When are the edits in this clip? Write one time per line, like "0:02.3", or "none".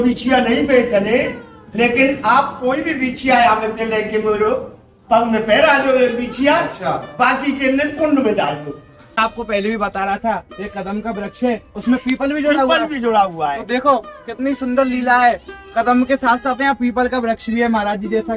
0:09.2